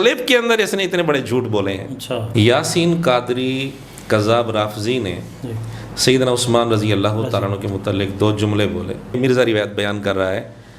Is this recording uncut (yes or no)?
no